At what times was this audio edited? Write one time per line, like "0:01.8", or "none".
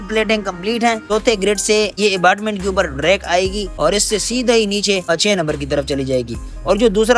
0:01.0
0:01.9
0:03.6
0:05.0

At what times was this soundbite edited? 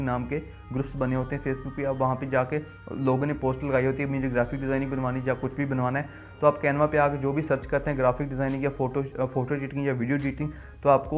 none

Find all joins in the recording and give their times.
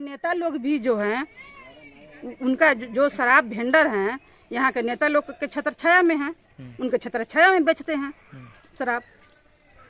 none

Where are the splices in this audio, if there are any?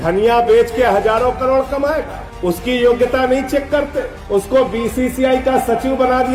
none

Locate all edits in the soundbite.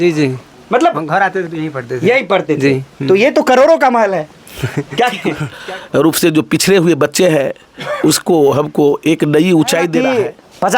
0:05.5
0:10.0

